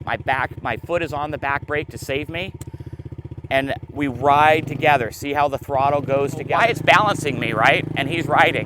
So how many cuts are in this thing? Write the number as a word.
one